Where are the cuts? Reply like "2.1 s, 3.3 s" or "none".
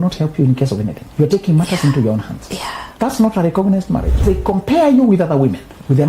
1.0 s, 2.8 s, 4.2 s